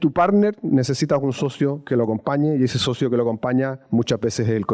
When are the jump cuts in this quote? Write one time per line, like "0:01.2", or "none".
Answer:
none